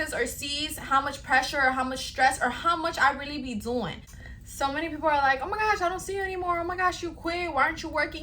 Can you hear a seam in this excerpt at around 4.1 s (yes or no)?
yes